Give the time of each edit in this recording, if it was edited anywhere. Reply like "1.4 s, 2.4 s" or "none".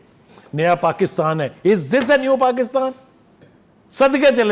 none